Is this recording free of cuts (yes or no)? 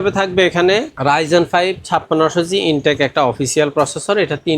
no